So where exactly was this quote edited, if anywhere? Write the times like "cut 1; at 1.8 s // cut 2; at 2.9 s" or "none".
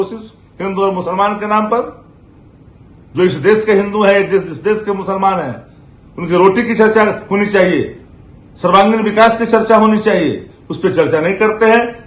none